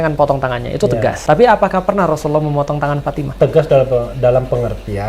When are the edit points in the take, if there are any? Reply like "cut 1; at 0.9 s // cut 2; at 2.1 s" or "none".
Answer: cut 1; at 1.2 s // cut 2; at 3.2 s